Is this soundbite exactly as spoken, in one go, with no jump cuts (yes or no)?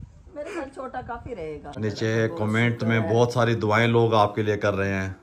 no